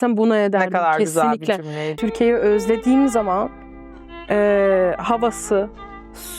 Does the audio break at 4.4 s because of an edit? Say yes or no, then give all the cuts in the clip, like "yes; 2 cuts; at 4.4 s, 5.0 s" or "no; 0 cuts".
no; 1 cut; at 1.9 s